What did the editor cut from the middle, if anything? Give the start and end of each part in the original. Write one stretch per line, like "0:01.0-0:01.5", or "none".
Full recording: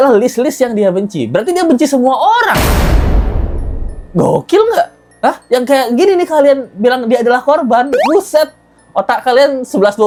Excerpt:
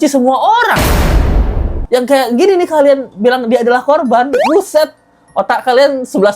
0:03.6-0:05.4